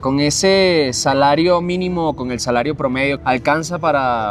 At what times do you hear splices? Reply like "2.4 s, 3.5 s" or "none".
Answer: 3.2 s